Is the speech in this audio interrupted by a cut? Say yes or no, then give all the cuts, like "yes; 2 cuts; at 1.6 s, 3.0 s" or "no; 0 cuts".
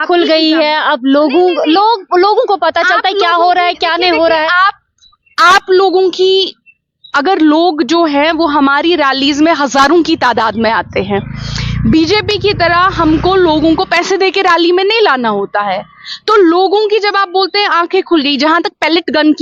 no; 0 cuts